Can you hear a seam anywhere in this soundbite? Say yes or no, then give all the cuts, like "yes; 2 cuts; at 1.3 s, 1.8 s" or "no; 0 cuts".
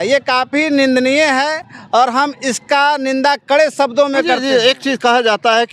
no; 0 cuts